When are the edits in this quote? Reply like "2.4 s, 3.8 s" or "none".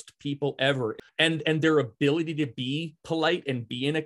0.9 s